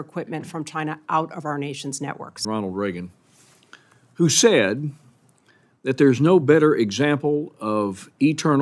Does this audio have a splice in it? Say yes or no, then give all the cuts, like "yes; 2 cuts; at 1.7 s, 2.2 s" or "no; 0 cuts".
yes; 1 cut; at 2.4 s